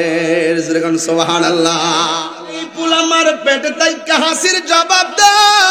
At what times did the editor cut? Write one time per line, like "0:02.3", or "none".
0:02.7